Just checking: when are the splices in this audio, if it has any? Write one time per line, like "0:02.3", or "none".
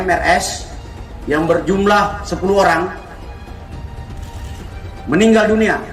none

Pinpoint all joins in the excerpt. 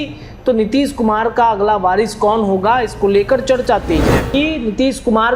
0:04.3

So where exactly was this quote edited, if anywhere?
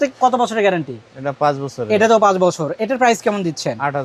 none

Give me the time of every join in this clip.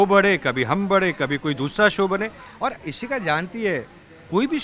none

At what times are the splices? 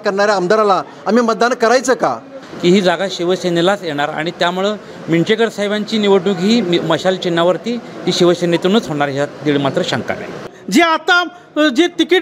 0:02.3
0:10.5

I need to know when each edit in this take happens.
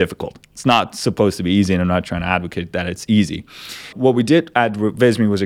0:03.9

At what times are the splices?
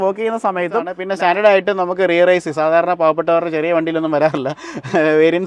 0:01.0

